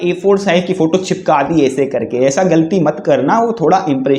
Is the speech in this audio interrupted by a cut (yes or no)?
no